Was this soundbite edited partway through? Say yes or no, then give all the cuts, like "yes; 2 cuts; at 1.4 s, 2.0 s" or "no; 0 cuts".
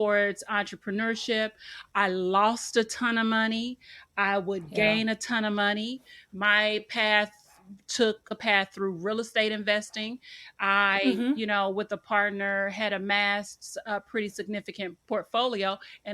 yes; 2 cuts; at 8.3 s, 14.9 s